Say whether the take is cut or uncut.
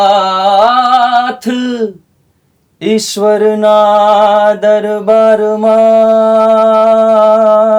uncut